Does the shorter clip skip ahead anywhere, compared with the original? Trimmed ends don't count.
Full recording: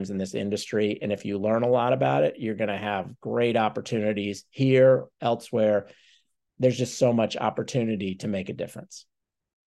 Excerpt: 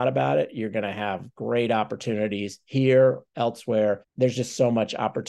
yes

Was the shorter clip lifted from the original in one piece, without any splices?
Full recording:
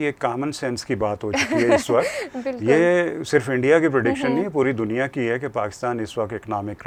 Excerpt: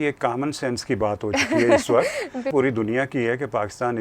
no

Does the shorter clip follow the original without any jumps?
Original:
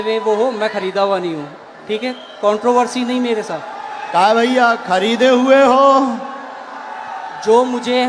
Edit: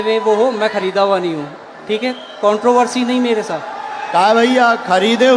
yes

